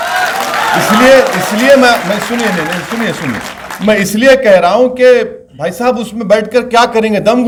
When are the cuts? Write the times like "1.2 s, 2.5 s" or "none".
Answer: none

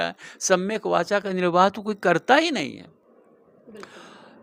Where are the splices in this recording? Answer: none

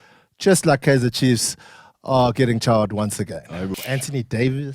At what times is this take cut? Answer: 3.8 s

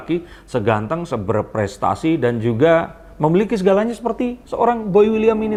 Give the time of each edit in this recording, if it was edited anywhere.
none

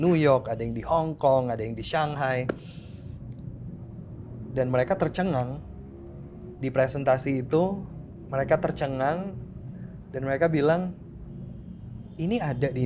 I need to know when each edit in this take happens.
none

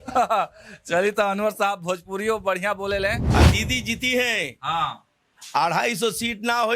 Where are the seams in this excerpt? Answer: 3.2 s

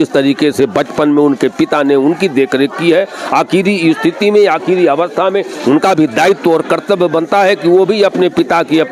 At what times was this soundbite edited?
none

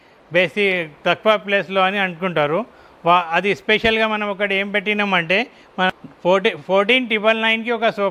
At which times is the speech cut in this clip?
5.9 s

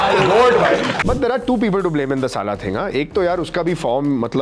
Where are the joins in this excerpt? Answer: 0.9 s

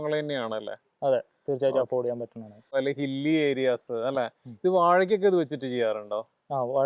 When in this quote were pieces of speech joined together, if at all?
2.7 s

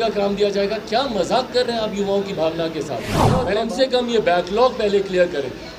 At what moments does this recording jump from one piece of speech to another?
3.4 s

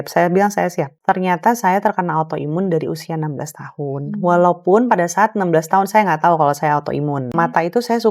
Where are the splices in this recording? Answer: 0.9 s, 7.3 s

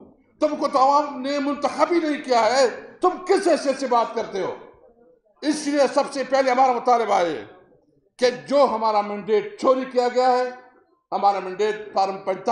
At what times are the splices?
none

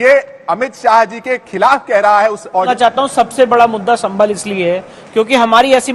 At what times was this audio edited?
2.7 s

